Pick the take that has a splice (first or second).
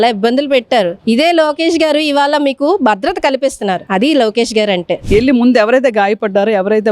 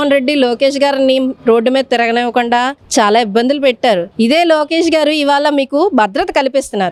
first